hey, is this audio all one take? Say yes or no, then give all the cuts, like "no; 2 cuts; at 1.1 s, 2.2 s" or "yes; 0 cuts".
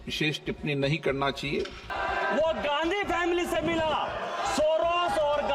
no; 1 cut; at 1.9 s